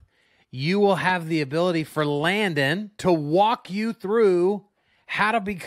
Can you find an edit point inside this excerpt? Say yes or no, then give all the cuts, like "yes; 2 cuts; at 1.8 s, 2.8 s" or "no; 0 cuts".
yes; 1 cut; at 2.9 s